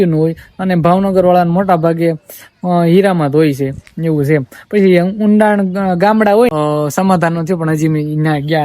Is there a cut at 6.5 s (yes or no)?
yes